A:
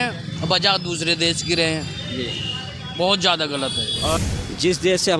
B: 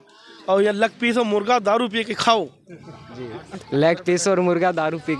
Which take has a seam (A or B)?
A